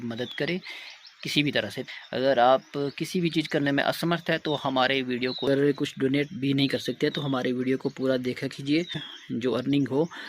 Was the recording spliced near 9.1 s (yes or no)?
yes